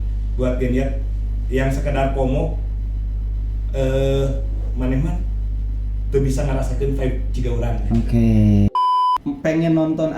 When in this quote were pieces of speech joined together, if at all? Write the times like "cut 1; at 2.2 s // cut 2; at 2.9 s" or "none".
cut 1; at 8.7 s